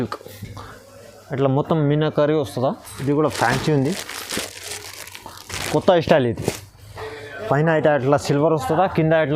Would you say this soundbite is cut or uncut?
cut